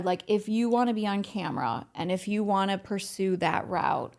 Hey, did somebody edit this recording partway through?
no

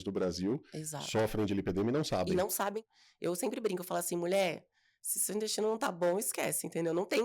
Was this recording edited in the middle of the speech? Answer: yes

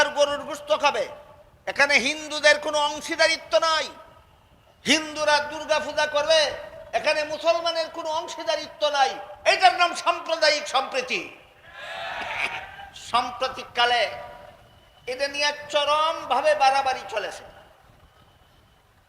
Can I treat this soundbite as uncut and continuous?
no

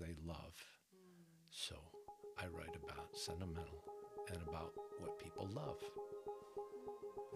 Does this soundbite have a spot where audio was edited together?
no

